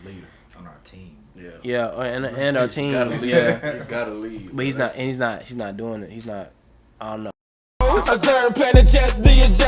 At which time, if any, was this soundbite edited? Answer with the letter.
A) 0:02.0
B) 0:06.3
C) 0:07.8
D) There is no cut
C